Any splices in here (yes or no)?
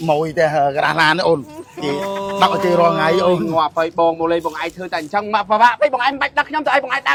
no